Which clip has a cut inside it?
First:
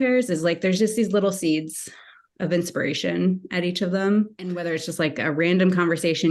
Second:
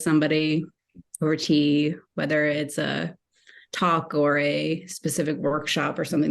first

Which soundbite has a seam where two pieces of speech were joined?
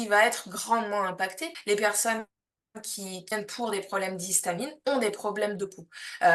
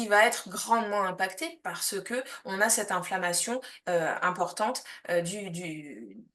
first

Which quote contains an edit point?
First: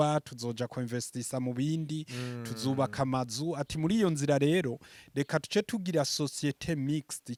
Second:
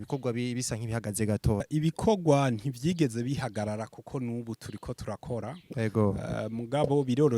second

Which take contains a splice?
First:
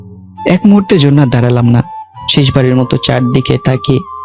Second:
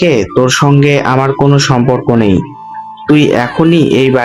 first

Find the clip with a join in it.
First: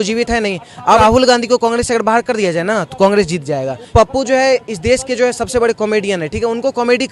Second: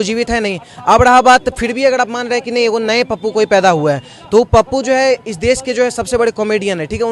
first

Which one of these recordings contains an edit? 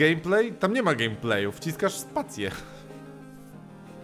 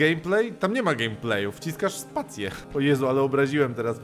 second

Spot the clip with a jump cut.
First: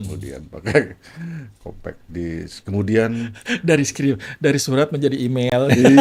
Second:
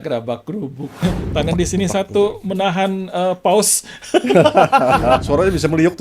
second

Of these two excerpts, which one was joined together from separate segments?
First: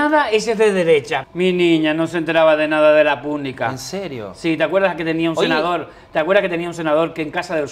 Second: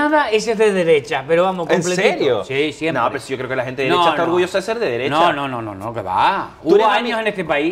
first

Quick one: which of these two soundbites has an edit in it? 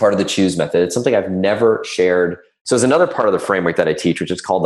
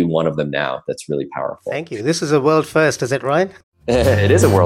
first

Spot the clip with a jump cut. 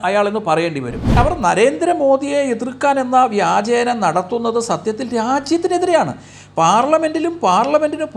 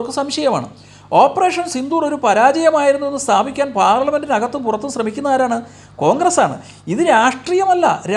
first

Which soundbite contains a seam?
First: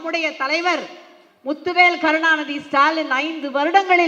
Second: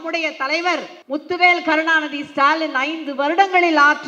second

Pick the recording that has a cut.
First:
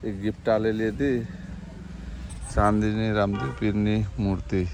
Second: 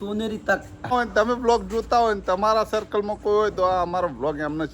second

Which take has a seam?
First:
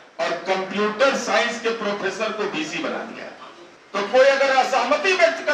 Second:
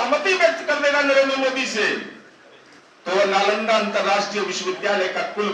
first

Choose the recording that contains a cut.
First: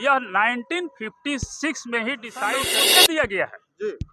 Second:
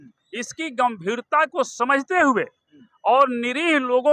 first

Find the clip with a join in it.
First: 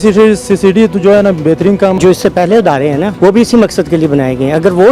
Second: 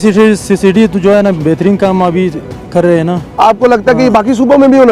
first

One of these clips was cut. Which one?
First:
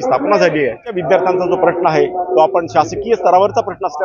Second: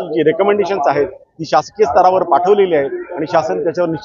first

